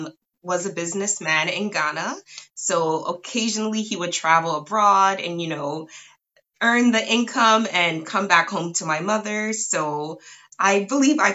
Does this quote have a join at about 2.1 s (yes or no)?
no